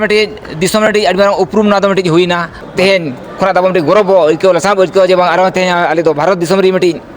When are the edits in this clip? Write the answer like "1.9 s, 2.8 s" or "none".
2.6 s